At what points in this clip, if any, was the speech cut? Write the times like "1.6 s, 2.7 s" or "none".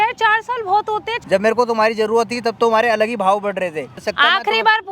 1.1 s, 4.1 s

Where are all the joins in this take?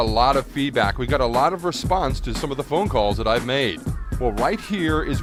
none

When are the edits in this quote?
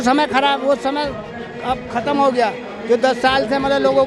none

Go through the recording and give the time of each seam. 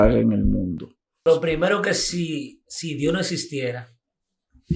1.1 s

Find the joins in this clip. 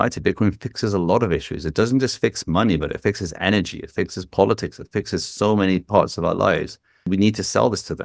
7.1 s

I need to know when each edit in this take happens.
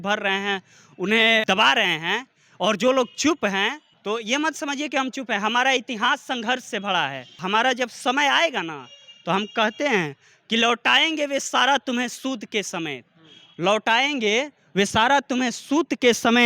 1.4 s, 3.9 s, 7.3 s

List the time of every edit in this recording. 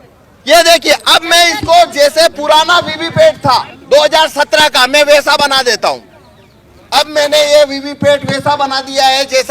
none

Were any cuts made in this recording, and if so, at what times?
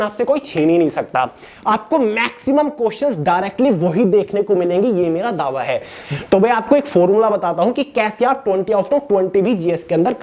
1.5 s, 6.0 s

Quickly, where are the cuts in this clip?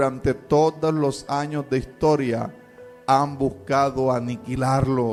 none

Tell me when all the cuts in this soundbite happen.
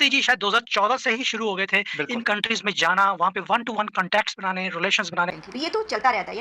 5.4 s

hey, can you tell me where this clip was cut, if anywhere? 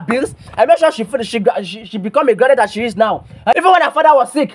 3.5 s

